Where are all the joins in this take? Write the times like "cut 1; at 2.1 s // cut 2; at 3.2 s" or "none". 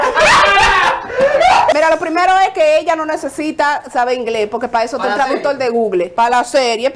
cut 1; at 1.7 s // cut 2; at 6.1 s